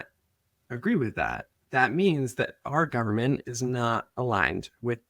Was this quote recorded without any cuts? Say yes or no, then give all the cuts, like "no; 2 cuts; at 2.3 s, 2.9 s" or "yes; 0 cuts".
no; 1 cut; at 1.5 s